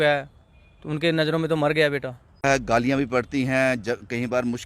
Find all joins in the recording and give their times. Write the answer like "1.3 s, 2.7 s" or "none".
2.4 s